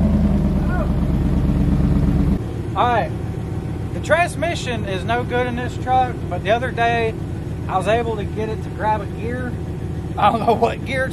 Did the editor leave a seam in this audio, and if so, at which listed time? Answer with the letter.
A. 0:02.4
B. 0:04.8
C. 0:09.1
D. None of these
A